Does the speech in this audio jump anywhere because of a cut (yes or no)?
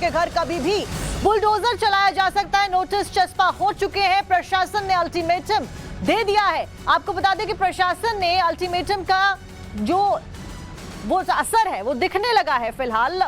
yes